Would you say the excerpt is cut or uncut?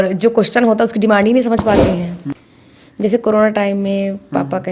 cut